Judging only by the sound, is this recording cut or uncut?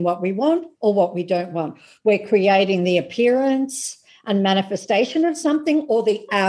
uncut